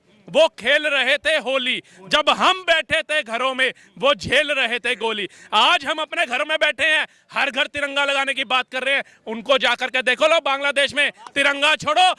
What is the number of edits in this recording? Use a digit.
0